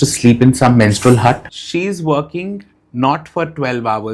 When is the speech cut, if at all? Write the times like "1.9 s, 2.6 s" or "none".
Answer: 1.5 s